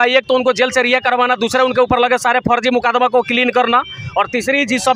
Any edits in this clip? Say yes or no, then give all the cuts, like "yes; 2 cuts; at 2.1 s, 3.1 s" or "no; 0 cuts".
no; 0 cuts